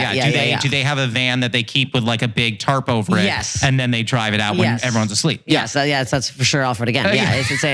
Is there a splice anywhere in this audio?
no; 0 cuts

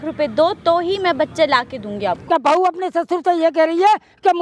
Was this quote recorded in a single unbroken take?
no; 1 cut; at 2.2 s

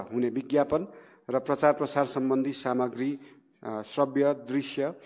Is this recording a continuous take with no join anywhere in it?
yes; 0 cuts

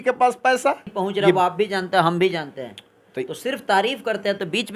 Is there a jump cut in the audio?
yes; 1 cut; at 1.4 s

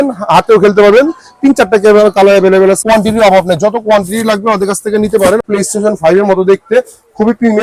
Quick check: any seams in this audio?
yes; 2 cuts; at 2.8 s, 5.4 s

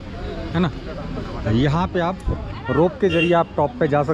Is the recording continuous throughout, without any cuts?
yes; 0 cuts

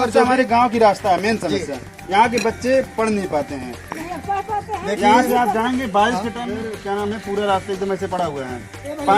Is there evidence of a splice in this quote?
yes; 1 cut; at 6.4 s

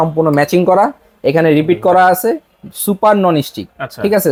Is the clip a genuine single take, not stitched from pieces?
yes; 0 cuts

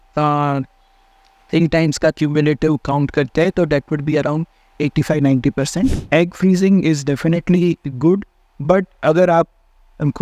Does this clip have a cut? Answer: yes; 1 cut; at 6.0 s

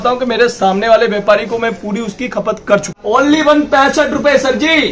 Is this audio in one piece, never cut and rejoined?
no; 1 cut; at 2.9 s

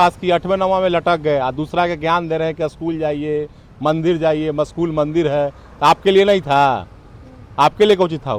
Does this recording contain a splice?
no; 0 cuts

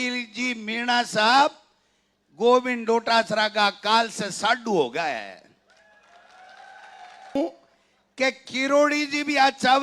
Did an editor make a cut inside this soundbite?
yes; 1 cut; at 7.4 s

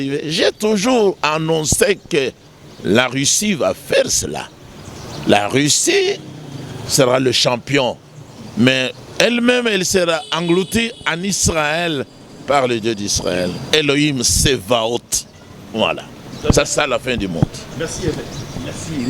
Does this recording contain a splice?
no; 0 cuts

